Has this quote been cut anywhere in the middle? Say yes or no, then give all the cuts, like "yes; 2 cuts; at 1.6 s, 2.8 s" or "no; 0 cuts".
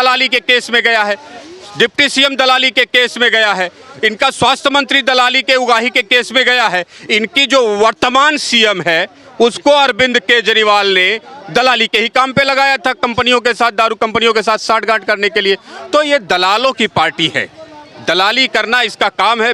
no; 0 cuts